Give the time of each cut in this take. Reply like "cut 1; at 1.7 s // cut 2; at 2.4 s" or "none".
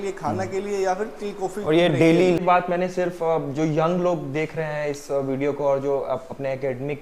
cut 1; at 2.4 s